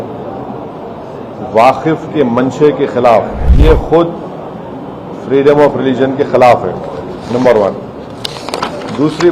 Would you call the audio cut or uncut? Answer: cut